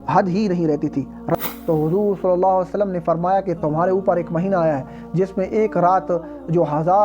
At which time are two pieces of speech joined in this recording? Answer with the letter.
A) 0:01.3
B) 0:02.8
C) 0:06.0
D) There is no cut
A